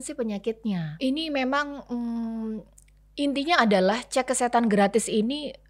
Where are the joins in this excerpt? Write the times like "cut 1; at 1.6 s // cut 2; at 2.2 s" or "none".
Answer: cut 1; at 1.0 s